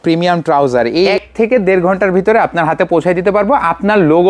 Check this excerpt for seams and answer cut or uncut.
cut